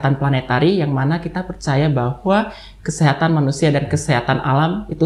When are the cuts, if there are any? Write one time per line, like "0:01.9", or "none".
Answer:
none